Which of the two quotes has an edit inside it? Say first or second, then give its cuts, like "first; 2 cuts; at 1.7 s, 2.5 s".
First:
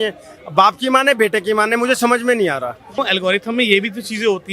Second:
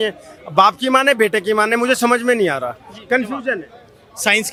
first; 1 cut; at 3.0 s